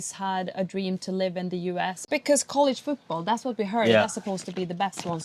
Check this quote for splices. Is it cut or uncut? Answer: cut